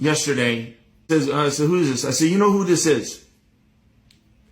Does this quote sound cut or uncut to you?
cut